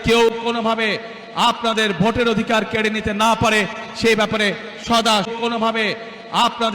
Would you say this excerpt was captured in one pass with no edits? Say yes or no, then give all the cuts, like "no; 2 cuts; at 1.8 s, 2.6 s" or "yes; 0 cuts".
no; 1 cut; at 5.3 s